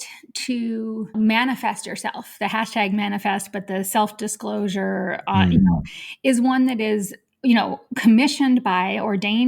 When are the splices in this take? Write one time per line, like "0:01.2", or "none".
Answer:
0:01.1